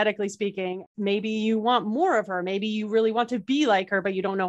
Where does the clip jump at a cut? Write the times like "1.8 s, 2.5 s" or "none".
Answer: 0.9 s